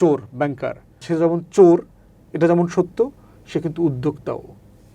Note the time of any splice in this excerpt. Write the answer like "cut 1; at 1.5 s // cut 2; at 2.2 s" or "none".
cut 1; at 1.0 s